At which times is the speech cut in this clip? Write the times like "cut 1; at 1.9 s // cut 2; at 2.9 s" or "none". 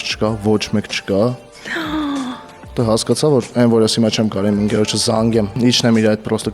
cut 1; at 1.5 s // cut 2; at 2.6 s // cut 3; at 5.6 s